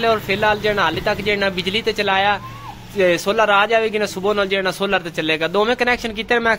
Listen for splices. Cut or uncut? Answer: uncut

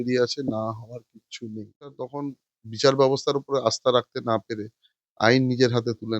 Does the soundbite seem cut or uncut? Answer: cut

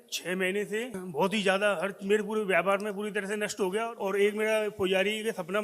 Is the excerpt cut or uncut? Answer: cut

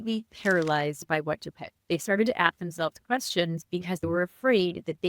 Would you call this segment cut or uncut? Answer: cut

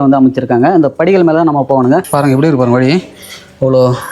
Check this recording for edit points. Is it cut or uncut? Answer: cut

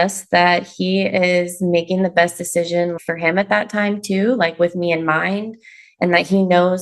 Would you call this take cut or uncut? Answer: cut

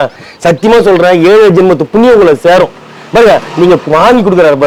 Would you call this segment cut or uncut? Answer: uncut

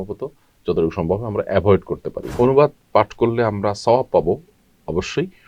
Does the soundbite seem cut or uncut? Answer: cut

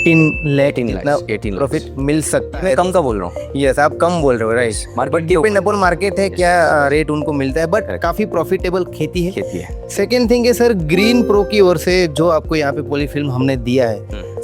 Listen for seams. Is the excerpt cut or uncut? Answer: uncut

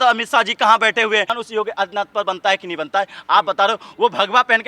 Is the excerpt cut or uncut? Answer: cut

